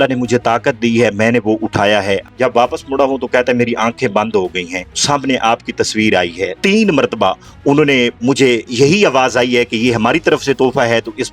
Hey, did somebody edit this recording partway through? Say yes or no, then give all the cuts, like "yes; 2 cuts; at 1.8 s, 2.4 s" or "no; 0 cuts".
yes; 3 cuts; at 2.2 s, 5.0 s, 6.6 s